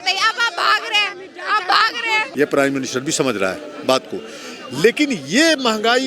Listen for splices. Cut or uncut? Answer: cut